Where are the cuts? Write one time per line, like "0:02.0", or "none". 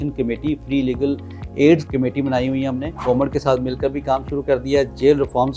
0:01.8
0:03.0